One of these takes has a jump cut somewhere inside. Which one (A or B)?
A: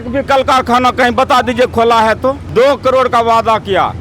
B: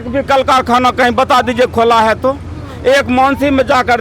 A